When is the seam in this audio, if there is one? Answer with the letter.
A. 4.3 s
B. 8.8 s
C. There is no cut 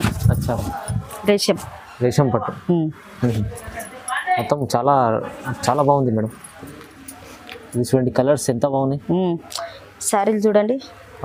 C